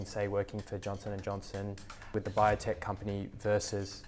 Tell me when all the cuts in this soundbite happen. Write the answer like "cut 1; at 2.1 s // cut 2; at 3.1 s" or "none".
cut 1; at 2.1 s